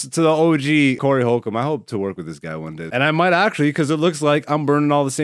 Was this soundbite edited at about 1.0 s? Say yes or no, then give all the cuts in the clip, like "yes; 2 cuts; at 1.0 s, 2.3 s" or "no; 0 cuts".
yes; 2 cuts; at 1.0 s, 2.8 s